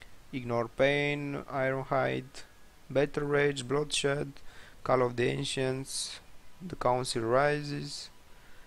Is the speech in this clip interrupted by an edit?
yes; 1 cut; at 2.2 s

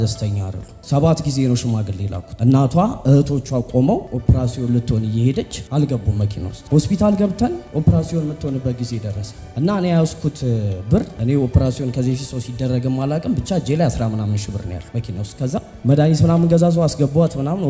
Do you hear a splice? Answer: yes; 2 cuts; at 2.2 s, 6.5 s

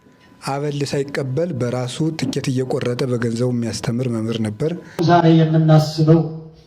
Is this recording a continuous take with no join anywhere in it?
no; 1 cut; at 5.0 s

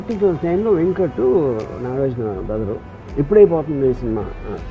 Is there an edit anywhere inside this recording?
yes; 1 cut; at 3.0 s

